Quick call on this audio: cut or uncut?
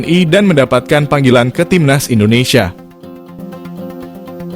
cut